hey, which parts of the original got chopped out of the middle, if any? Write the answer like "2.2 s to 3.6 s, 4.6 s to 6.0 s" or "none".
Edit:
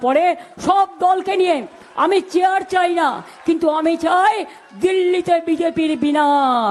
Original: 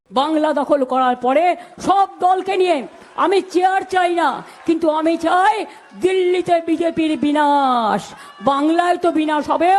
none